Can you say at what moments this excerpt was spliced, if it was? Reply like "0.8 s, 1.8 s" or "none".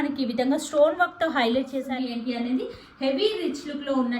1.9 s